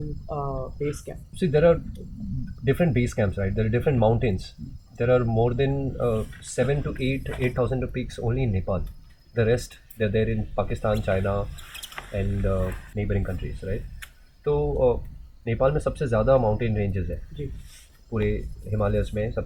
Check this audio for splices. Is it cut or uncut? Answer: cut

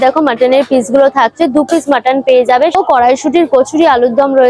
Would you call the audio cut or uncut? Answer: cut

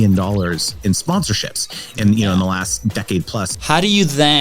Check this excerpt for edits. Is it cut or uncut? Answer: cut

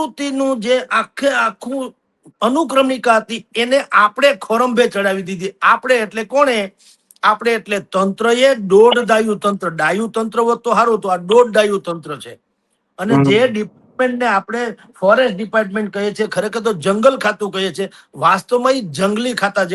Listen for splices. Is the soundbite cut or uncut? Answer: uncut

